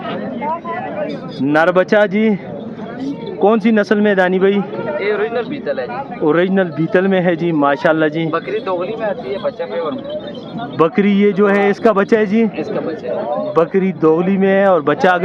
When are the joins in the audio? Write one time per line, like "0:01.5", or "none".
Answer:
none